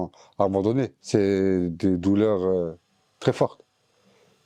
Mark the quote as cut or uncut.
cut